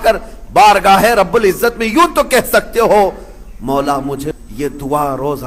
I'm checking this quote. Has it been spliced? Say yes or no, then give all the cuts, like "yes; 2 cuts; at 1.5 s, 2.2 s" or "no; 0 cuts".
yes; 1 cut; at 4.4 s